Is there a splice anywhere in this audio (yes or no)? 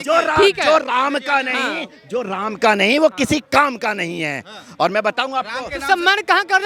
no